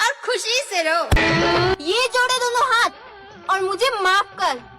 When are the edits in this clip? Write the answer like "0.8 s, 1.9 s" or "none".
1.2 s